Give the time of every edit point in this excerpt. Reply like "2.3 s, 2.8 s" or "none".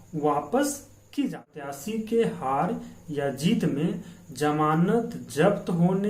1.8 s